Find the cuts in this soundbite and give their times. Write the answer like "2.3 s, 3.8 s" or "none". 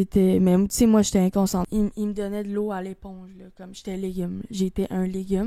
1.7 s

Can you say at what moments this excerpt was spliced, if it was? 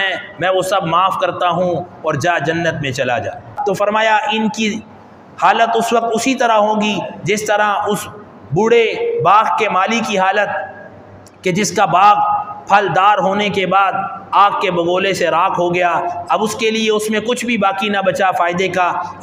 3.6 s

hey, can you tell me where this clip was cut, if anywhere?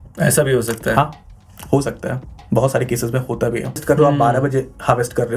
3.8 s

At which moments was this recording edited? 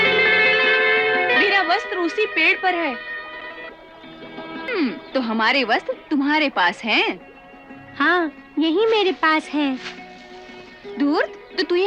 4.7 s

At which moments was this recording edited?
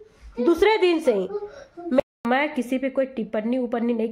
2.0 s

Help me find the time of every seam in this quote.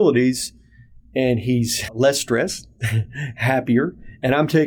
1.9 s

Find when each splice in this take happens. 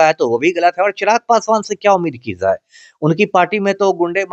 none

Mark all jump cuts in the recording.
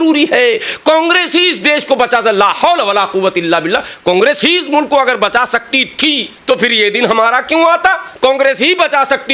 6.3 s, 8.1 s

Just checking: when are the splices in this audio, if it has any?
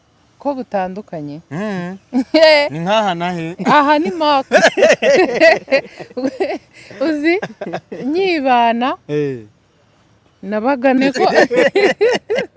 11.0 s

